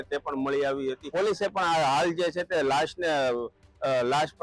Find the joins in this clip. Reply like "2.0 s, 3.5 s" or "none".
1.0 s